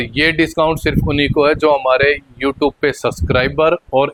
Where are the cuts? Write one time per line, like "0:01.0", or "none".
none